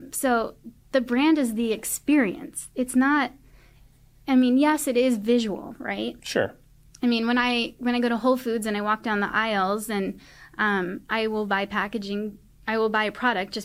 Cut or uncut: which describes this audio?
uncut